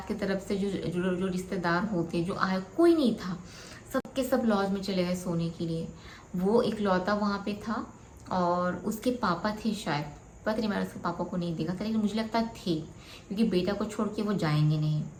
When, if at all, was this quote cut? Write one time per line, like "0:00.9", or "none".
none